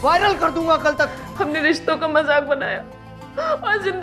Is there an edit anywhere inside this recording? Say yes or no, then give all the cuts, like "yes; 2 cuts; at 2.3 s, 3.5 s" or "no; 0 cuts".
yes; 1 cut; at 1.2 s